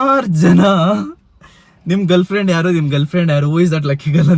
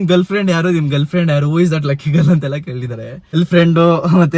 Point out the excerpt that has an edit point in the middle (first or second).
second